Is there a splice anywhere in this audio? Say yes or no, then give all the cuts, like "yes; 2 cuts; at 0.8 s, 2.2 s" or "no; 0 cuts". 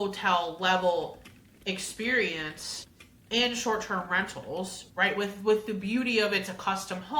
no; 0 cuts